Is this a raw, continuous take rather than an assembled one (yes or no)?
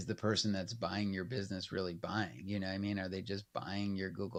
yes